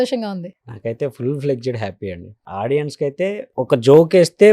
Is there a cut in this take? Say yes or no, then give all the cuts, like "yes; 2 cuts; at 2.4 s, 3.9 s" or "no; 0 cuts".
yes; 2 cuts; at 2.3 s, 3.5 s